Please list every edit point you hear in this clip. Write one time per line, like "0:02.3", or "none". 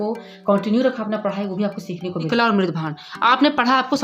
0:02.3

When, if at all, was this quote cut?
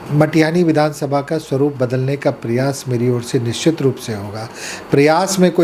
none

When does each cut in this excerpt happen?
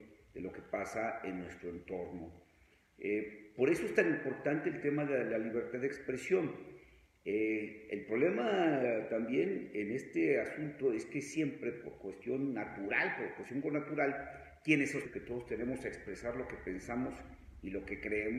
none

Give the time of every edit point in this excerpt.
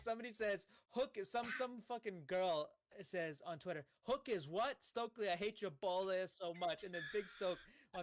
none

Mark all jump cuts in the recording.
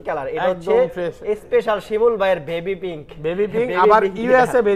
none

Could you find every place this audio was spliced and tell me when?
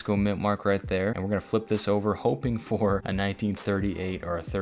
0:01.2
0:03.1

